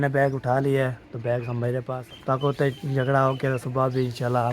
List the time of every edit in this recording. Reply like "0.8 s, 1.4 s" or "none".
1.9 s